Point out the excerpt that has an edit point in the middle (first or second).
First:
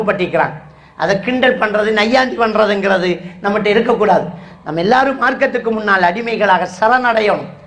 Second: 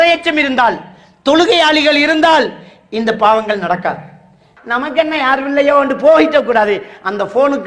second